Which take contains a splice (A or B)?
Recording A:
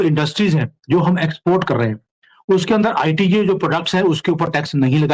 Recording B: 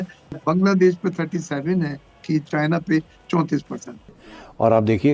B